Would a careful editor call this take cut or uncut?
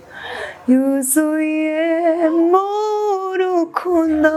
uncut